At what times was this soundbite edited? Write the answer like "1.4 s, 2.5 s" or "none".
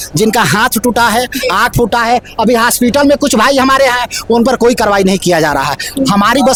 none